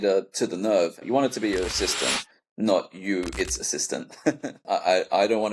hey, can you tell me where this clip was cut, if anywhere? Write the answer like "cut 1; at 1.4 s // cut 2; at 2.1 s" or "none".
cut 1; at 1.0 s // cut 2; at 4.6 s